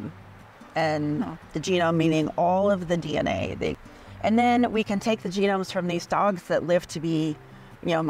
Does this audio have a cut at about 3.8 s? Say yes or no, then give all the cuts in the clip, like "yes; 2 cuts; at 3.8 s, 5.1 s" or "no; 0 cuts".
yes; 1 cut; at 3.8 s